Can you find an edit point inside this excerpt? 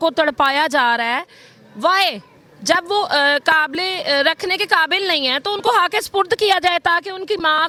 no; 0 cuts

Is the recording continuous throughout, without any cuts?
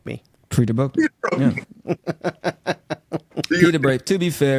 yes; 0 cuts

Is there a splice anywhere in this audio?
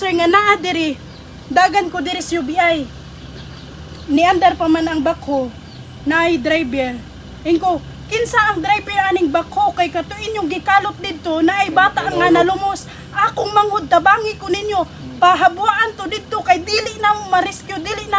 no; 0 cuts

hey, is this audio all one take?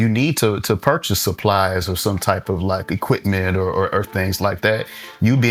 yes; 0 cuts

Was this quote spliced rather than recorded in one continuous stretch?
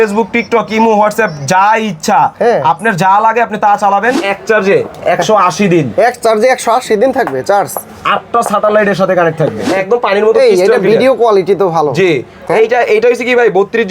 yes; 2 cuts; at 4.2 s, 9.7 s

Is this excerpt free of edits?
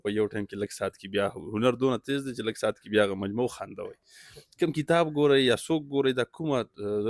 yes; 0 cuts

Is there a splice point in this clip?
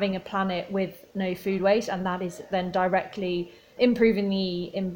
yes; 1 cut; at 3.7 s

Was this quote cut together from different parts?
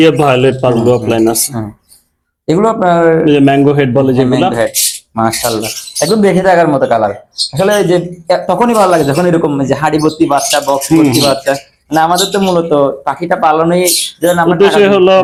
no; 0 cuts

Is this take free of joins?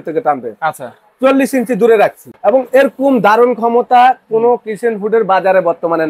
no; 1 cut; at 2.3 s

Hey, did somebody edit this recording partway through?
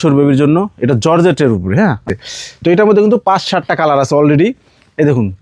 yes; 1 cut; at 2.2 s

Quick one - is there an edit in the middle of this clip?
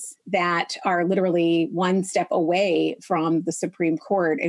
no; 0 cuts

